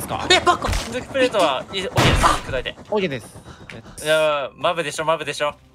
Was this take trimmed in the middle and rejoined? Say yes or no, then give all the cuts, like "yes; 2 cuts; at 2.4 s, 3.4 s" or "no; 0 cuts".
yes; 1 cut; at 3.9 s